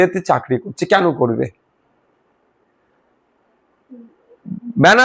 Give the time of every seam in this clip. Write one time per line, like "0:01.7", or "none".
none